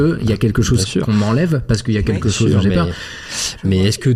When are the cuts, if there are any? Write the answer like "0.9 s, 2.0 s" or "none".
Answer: none